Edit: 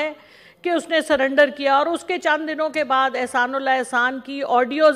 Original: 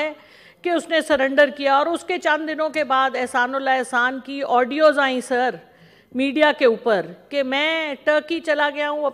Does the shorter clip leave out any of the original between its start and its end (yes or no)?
no